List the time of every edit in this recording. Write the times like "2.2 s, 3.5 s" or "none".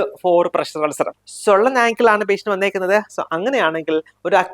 1.1 s